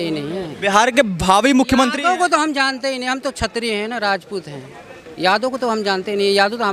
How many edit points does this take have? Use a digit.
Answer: 0